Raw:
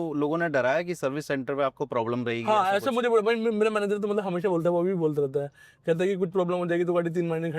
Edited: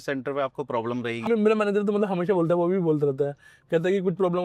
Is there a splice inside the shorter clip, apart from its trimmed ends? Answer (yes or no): yes